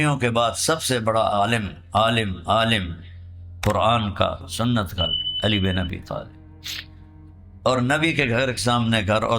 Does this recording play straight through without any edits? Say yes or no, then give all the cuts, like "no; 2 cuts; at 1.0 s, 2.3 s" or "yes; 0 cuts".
no; 1 cut; at 1.3 s